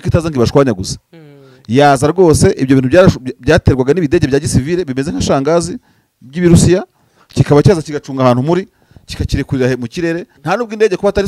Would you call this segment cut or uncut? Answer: cut